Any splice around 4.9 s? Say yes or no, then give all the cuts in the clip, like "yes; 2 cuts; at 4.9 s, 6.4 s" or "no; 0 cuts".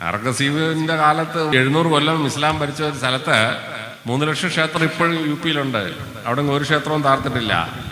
no; 1 cut; at 1.5 s